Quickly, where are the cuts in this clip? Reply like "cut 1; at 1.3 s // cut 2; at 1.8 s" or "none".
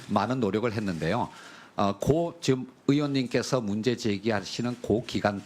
cut 1; at 2.8 s